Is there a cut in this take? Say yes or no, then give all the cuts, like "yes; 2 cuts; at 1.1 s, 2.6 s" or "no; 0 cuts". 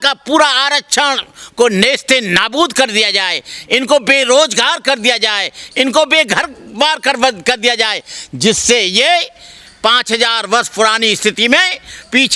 no; 0 cuts